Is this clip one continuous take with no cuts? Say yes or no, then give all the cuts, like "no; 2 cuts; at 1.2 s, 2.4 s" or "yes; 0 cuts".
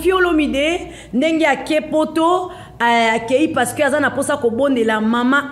yes; 0 cuts